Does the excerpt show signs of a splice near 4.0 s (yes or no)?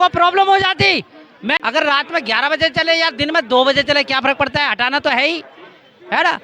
no